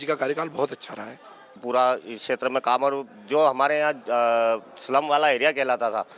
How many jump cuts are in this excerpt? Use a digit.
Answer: 1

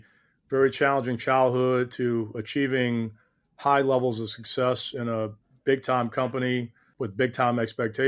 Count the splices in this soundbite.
1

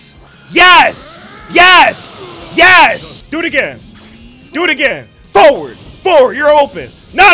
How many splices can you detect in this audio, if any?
1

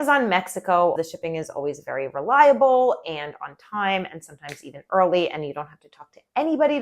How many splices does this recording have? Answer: 1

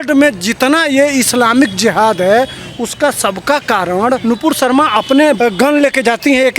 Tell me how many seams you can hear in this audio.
2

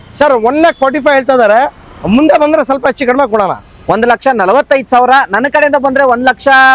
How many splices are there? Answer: 0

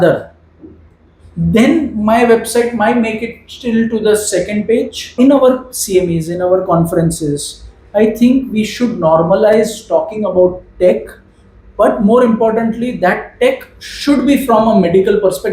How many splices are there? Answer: 1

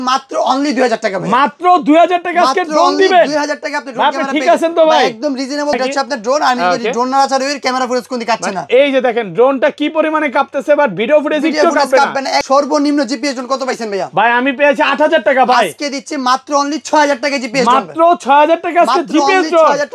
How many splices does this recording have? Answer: 2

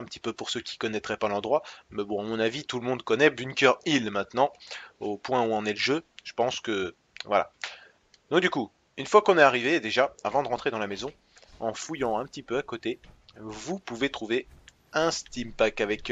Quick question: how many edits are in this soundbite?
0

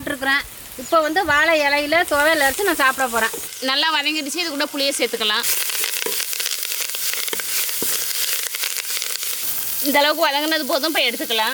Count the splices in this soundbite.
0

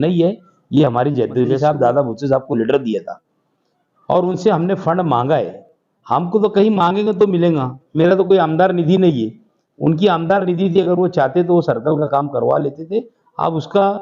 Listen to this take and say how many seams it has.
1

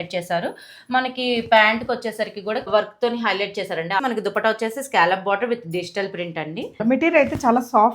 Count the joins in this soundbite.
3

